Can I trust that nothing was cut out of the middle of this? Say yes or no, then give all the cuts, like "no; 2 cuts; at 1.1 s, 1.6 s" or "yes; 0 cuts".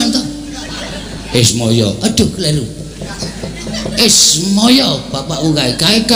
yes; 0 cuts